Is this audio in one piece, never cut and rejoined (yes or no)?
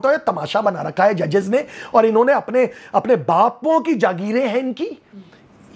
yes